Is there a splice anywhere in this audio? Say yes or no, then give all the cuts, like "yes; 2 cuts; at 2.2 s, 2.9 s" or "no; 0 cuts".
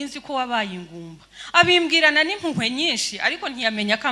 no; 0 cuts